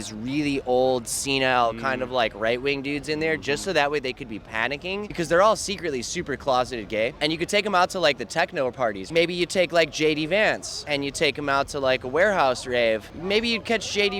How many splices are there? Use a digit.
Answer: 5